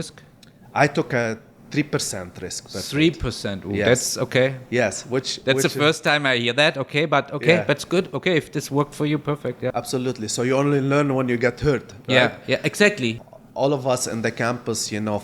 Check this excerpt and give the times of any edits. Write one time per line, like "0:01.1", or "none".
0:09.7
0:13.2